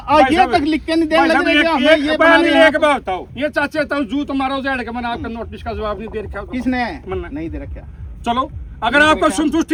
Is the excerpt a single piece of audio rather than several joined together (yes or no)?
yes